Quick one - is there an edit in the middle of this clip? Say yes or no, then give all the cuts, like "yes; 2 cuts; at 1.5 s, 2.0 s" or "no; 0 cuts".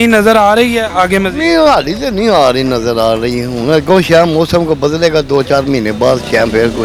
no; 0 cuts